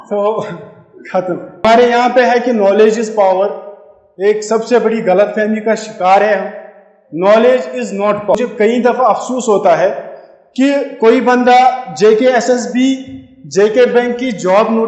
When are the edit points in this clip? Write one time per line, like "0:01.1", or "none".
0:01.6
0:08.3